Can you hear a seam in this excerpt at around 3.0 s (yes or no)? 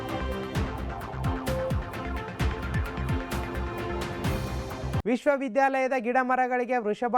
yes